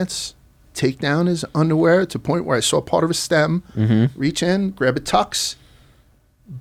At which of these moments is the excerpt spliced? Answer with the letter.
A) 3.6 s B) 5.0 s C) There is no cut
C